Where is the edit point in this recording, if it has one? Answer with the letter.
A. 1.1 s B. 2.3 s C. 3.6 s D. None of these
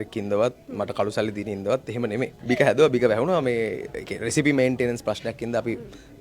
B